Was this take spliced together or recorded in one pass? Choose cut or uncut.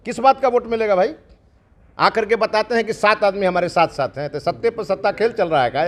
uncut